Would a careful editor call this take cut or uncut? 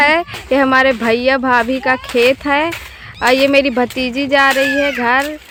uncut